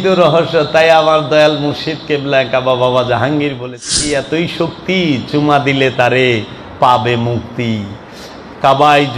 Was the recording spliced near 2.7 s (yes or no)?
no